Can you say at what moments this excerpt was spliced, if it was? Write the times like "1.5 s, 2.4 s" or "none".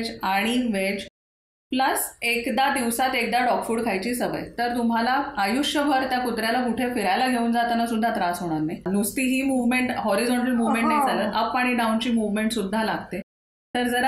8.9 s